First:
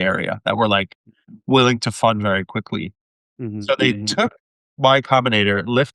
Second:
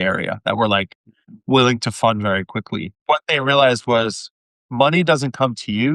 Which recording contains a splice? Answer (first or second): second